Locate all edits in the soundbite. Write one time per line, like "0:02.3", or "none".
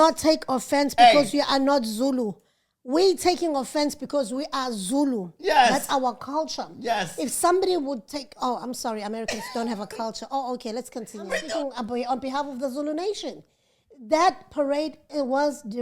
0:11.4